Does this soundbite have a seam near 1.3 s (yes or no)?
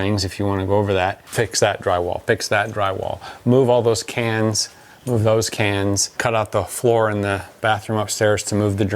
yes